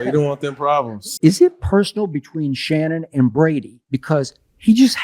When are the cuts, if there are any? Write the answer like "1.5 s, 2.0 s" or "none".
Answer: 1.0 s